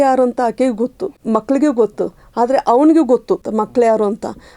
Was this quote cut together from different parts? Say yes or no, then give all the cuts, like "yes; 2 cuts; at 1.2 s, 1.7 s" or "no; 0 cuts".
yes; 2 cuts; at 1.1 s, 3.5 s